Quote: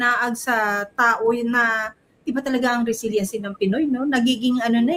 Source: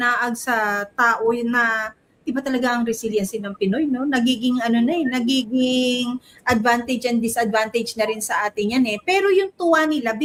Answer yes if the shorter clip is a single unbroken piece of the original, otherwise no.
yes